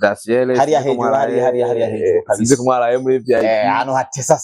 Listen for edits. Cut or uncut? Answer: uncut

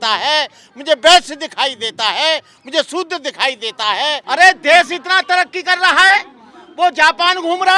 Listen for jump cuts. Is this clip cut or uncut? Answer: cut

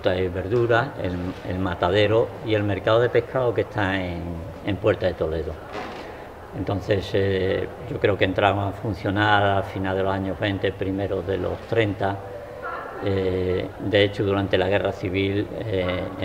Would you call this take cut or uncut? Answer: cut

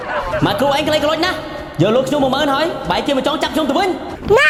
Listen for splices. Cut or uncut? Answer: uncut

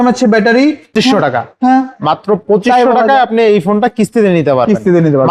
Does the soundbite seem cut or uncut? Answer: cut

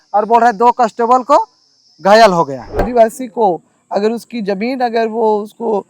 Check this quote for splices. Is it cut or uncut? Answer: cut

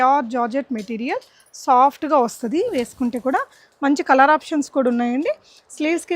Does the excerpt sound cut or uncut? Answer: uncut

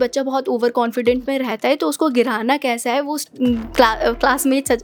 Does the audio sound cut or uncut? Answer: uncut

